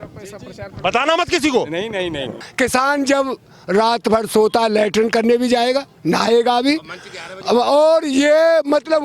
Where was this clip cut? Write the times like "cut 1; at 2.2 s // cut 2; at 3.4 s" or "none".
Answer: cut 1; at 2.3 s